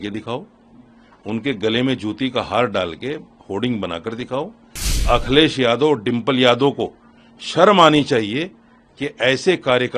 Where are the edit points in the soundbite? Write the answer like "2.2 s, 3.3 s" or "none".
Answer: 5.0 s